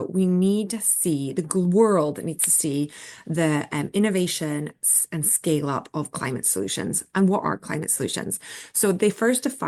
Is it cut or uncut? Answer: uncut